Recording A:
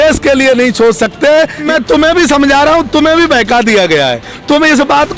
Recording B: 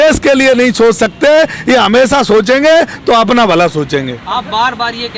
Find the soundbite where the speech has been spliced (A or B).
A